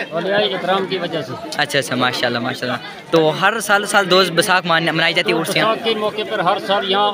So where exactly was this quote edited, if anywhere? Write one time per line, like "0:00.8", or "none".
none